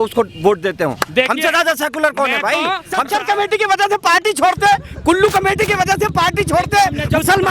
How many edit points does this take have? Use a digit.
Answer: 1